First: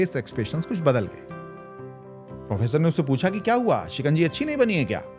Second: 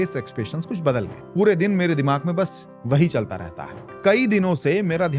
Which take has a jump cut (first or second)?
second